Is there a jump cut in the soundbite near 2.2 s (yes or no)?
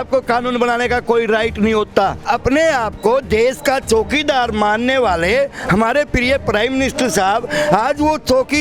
yes